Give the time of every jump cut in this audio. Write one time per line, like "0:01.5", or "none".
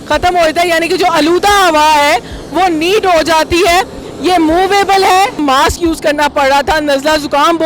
0:05.4